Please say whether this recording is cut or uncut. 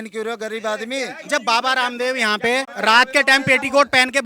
cut